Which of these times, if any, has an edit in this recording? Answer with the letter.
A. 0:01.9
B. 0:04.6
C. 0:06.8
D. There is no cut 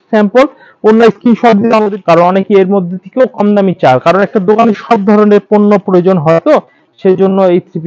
A